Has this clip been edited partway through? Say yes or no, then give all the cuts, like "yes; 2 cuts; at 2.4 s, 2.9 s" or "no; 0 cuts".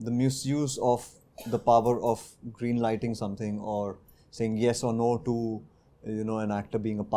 no; 0 cuts